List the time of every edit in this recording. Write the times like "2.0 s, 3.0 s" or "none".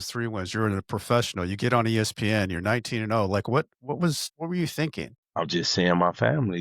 4.3 s, 5.2 s